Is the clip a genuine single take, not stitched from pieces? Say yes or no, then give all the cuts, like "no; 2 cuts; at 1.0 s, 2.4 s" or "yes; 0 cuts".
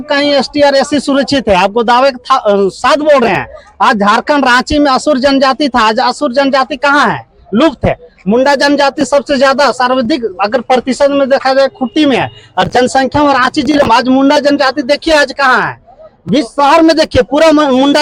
yes; 0 cuts